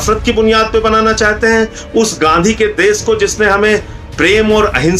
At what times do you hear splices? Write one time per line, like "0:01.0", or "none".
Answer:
none

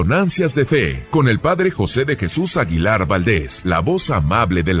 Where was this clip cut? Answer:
0:01.0
0:03.5

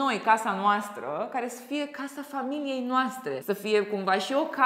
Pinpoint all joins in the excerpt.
none

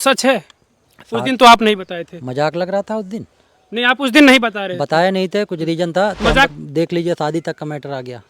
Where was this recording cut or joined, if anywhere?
0:06.5

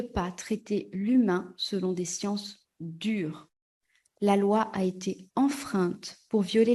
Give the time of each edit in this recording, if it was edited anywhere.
0:03.7

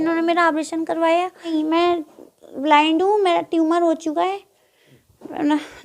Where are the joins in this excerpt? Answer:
0:01.5

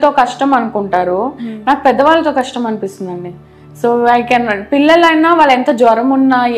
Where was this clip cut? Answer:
none

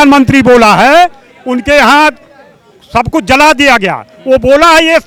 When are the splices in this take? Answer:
none

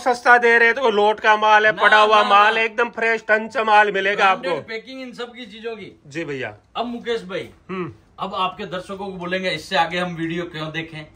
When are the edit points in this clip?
none

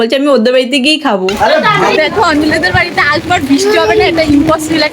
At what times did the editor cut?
0:01.9

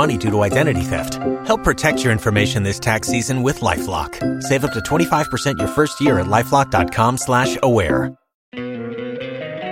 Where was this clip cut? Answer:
0:08.5

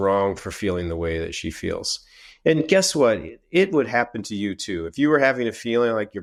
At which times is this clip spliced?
none

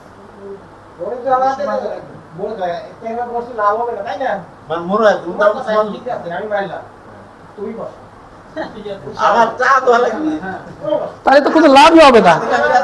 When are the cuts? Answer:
none

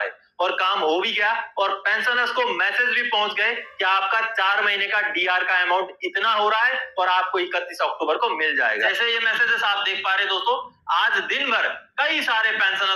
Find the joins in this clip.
0:09.0

